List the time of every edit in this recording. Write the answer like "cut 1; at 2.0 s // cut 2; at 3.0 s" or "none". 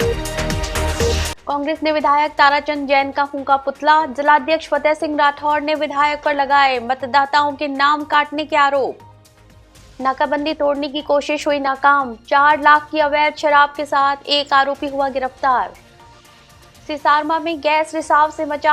cut 1; at 1.0 s